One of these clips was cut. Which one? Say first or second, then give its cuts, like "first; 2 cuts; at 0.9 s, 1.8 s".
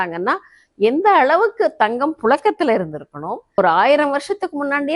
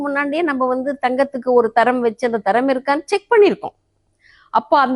first; 1 cut; at 3.6 s